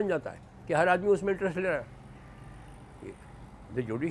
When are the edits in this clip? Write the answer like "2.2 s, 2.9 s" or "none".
none